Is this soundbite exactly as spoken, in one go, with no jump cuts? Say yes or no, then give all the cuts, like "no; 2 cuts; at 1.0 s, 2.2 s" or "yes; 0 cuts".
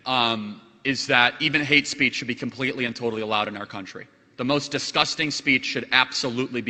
yes; 0 cuts